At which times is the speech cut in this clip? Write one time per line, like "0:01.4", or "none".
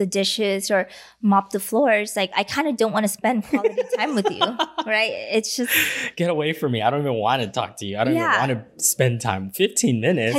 none

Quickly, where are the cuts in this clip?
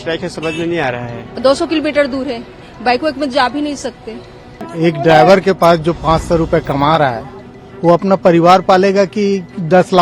0:01.2
0:04.6

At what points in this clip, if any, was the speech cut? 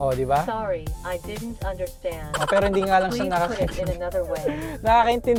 none

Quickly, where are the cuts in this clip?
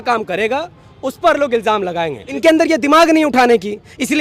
0:02.3

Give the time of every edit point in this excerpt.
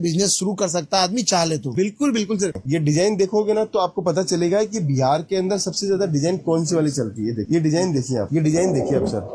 none

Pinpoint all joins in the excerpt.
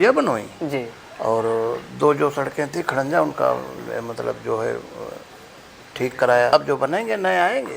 0:06.5

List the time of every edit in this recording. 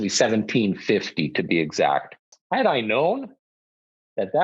0:02.3

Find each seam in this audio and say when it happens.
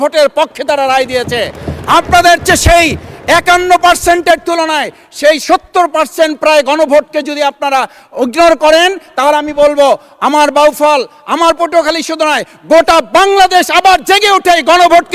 none

